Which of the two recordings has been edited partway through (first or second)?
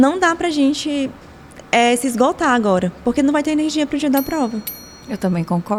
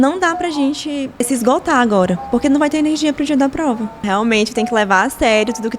second